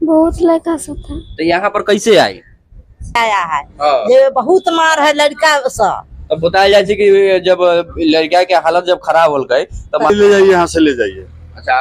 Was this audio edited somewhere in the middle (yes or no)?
yes